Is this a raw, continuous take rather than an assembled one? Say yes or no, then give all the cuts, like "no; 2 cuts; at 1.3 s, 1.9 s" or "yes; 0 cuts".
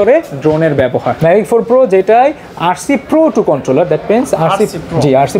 no; 1 cut; at 1.1 s